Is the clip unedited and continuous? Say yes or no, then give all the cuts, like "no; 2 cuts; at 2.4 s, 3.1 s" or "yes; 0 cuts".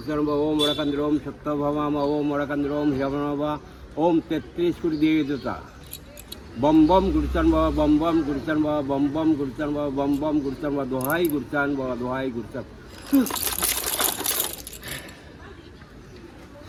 yes; 0 cuts